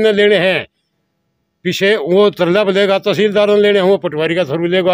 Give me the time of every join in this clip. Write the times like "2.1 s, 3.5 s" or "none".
none